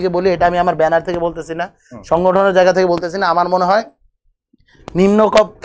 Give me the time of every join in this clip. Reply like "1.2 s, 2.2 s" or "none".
none